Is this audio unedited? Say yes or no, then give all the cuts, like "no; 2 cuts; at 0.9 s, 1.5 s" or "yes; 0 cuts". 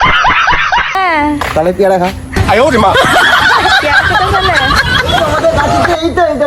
yes; 0 cuts